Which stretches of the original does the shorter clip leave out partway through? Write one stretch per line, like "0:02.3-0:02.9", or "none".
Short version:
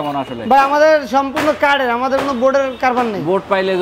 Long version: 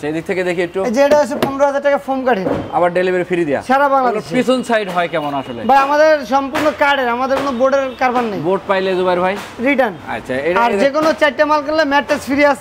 none

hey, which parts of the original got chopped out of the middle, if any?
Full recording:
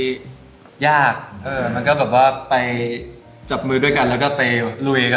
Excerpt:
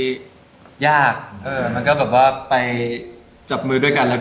none

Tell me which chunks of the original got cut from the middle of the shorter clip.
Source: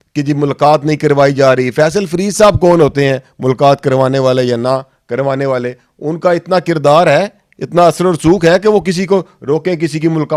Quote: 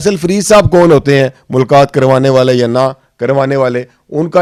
none

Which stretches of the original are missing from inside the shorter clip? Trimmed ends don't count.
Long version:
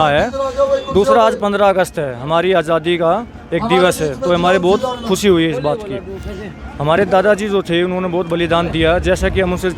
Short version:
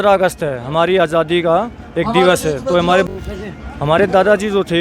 0:04.6-0:06.0

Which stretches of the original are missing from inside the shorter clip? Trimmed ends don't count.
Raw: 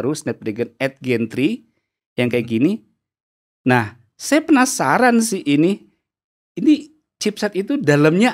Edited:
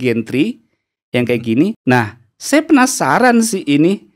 0:02.8-0:03.6

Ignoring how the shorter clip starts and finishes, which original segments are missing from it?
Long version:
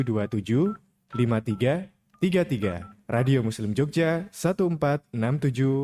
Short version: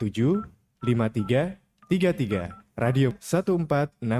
0:03.5-0:04.3

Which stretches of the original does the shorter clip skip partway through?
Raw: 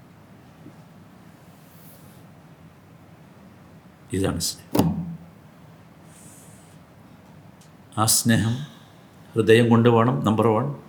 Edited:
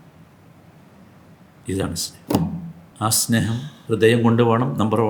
0:05.2-0:07.7
0:08.7-0:09.2

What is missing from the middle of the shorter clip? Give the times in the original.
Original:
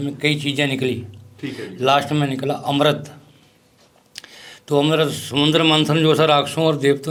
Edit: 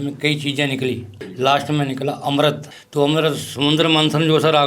0:01.2-0:01.6
0:03.2-0:04.5

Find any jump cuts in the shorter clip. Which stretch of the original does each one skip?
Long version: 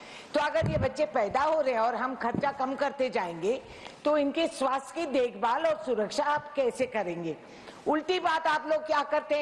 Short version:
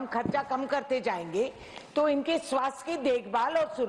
none

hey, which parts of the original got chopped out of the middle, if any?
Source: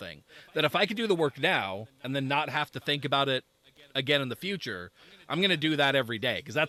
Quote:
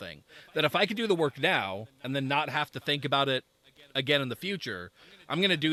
none

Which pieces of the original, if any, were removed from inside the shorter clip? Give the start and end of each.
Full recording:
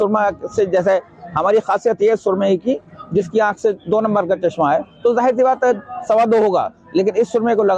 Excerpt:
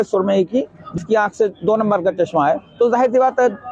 0:03.1-0:03.2

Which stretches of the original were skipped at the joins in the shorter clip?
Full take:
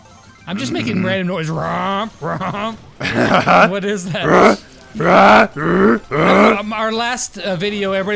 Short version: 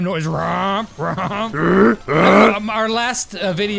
0:02.8-0:05.6

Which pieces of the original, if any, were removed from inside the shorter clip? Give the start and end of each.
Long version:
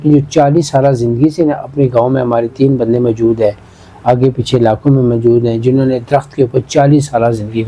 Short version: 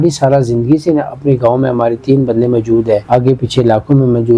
0:03.6-0:04.0

